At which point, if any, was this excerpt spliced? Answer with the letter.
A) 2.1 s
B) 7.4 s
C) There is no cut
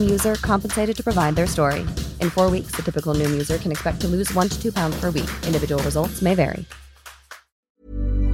B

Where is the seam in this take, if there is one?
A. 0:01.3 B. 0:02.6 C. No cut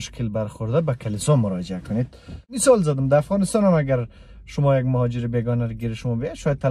B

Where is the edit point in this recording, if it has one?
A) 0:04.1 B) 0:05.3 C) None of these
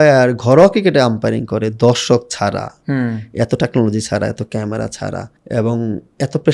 B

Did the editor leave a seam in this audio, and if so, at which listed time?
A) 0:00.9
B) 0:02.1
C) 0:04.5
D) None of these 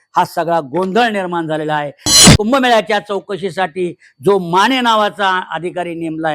B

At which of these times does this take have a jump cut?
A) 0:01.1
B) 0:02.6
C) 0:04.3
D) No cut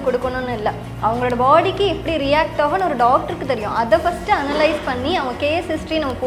D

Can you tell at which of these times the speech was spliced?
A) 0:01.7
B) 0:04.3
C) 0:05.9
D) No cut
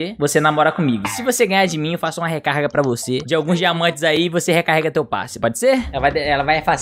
C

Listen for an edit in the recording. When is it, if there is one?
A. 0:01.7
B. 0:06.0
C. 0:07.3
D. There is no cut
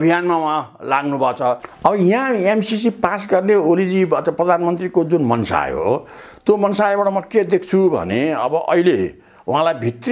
A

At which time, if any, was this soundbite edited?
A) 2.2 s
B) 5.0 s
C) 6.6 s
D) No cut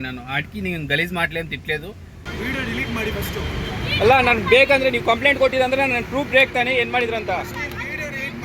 A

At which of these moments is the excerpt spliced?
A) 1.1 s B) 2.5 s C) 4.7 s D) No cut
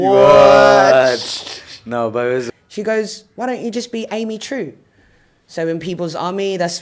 B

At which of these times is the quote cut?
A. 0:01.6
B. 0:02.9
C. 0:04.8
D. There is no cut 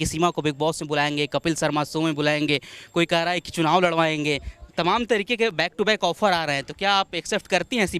D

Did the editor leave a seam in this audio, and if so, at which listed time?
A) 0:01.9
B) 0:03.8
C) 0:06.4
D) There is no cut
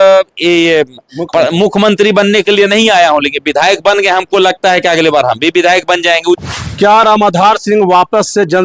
C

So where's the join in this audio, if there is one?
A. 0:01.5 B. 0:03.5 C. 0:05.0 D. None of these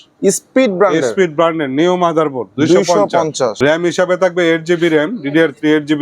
B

